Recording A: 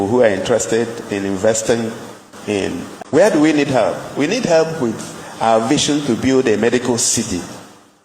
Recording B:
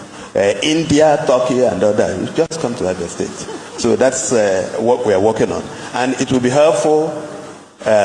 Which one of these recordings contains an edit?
A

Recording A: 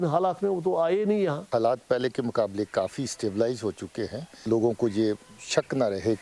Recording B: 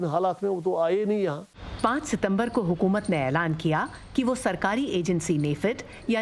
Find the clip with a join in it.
A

